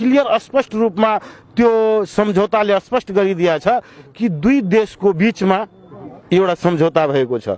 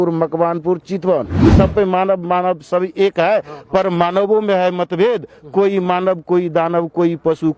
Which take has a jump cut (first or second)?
second